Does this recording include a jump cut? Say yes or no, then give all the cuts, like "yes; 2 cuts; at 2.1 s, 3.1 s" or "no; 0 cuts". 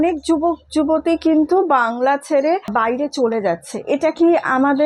yes; 1 cut; at 2.7 s